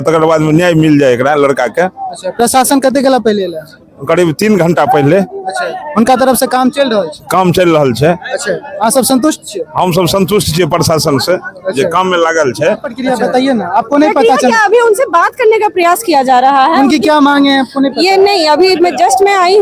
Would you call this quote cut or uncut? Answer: cut